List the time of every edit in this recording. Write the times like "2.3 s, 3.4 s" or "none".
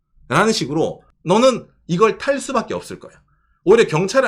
1.1 s